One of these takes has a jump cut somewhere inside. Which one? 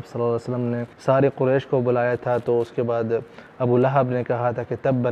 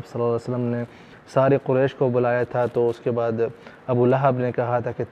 first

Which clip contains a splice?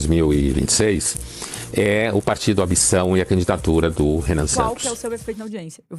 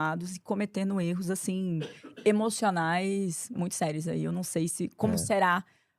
first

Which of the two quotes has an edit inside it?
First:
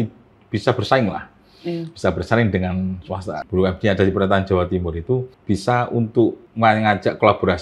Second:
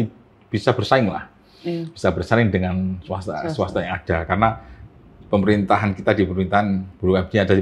first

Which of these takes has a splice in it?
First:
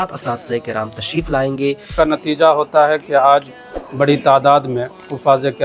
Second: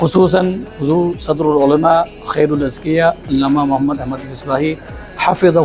first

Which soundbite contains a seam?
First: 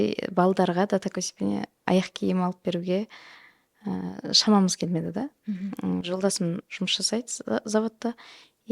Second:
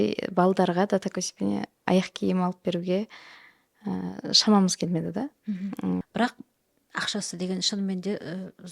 second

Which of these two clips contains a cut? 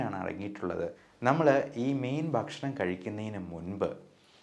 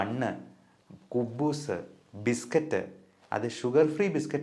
first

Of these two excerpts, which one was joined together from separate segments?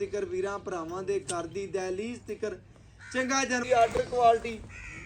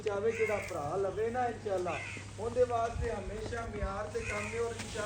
first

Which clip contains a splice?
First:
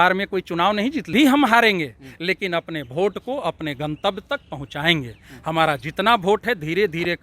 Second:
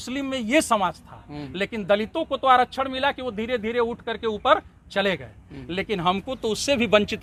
first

